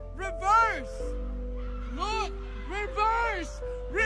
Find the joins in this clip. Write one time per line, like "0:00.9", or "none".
none

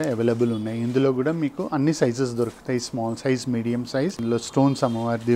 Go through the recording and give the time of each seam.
0:04.2

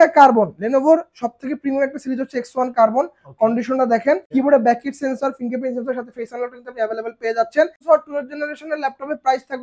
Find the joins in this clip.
0:04.2
0:07.8

